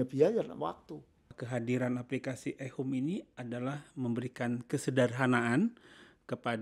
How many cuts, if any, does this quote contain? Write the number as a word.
one